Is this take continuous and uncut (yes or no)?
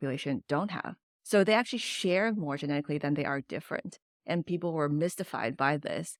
yes